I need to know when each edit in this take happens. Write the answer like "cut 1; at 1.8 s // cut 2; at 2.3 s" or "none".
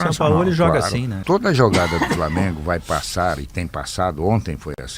cut 1; at 1.1 s